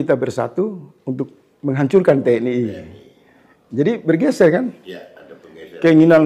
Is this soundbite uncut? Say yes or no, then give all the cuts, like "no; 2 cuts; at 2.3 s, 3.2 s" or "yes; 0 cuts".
yes; 0 cuts